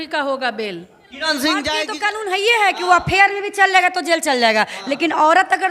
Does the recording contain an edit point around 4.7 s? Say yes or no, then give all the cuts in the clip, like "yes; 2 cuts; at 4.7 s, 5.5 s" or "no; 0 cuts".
no; 1 cut; at 1.9 s